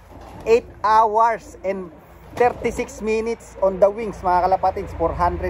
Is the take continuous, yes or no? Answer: yes